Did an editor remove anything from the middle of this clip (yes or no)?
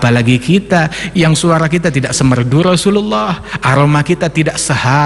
no